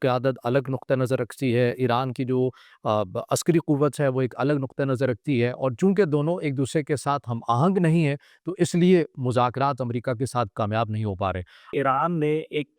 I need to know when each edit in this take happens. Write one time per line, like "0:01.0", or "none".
0:11.7